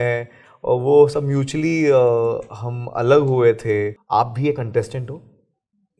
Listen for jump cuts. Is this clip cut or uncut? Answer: cut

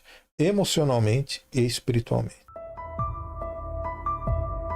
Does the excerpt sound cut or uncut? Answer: cut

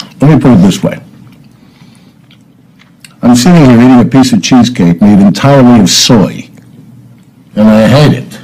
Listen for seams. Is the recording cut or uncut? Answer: cut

